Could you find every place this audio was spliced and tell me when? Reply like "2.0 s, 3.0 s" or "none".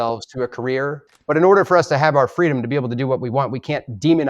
1.1 s